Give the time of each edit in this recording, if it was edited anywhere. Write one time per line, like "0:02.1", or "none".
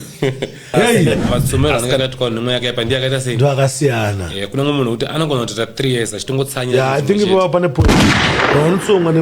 0:01.1

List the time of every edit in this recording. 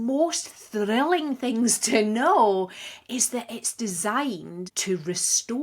0:04.6

